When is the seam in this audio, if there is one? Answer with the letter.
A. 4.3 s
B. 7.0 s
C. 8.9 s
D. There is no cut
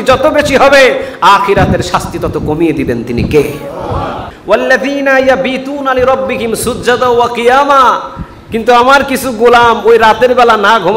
A